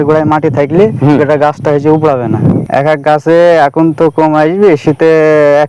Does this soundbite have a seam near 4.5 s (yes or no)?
no